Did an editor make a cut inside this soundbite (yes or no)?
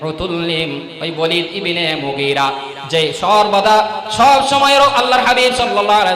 no